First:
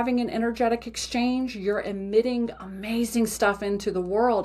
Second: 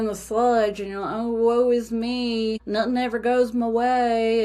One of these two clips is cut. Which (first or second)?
second